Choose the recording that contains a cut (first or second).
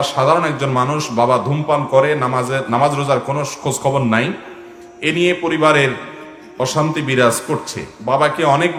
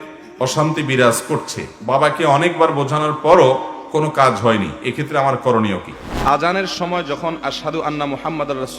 second